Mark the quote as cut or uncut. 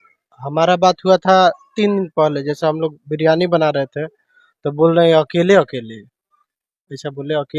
uncut